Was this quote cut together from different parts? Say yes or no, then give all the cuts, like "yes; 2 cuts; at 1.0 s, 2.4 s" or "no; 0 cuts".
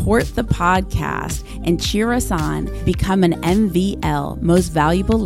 no; 0 cuts